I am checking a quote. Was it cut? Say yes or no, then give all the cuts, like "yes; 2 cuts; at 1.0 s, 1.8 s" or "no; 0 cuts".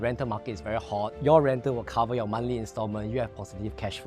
yes; 1 cut; at 1.2 s